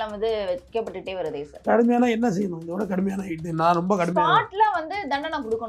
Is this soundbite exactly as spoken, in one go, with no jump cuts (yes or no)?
no